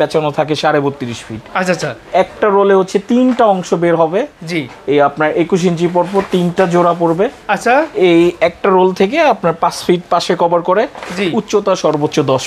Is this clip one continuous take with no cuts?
yes; 0 cuts

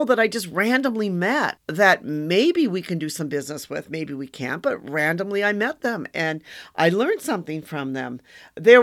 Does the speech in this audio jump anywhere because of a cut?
yes; 1 cut; at 1.6 s

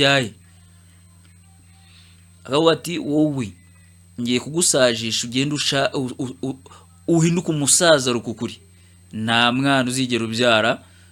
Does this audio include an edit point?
no; 0 cuts

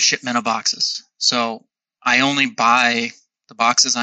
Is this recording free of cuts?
yes; 0 cuts

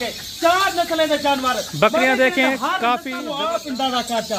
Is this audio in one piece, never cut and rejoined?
no; 1 cut; at 3.2 s

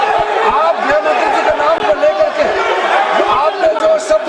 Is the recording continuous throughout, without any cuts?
yes; 0 cuts

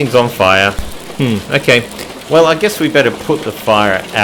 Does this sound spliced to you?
no; 0 cuts

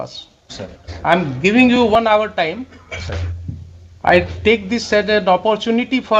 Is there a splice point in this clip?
no; 0 cuts

